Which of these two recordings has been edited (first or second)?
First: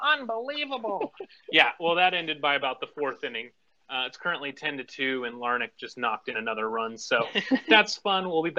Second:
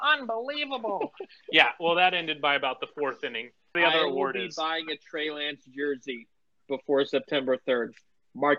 second